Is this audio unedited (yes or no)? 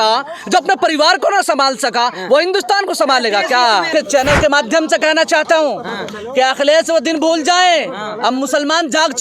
no